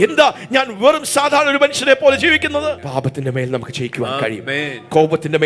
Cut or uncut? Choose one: cut